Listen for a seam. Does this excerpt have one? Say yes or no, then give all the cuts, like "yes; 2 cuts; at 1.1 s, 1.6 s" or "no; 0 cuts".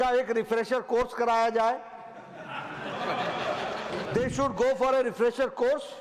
yes; 1 cut; at 4.0 s